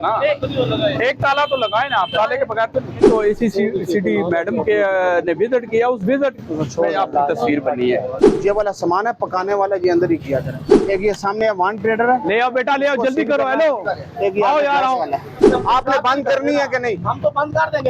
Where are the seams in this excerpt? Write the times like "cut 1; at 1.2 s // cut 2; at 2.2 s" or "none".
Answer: cut 1; at 3.1 s // cut 2; at 8.2 s // cut 3; at 10.6 s // cut 4; at 15.5 s